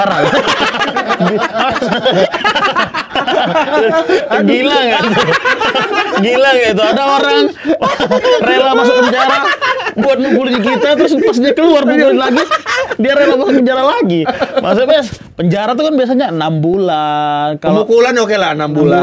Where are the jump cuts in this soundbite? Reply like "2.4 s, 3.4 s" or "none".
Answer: 14.3 s

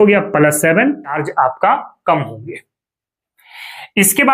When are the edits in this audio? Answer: 1.2 s

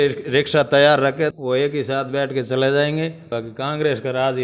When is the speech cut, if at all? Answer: 1.3 s, 3.3 s

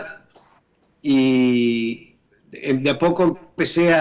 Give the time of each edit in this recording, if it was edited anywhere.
1.0 s

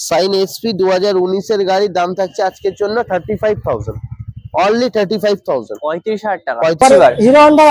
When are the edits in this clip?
6.8 s

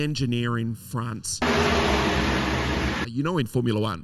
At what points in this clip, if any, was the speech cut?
1.4 s, 3.0 s

